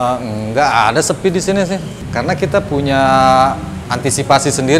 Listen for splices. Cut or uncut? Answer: cut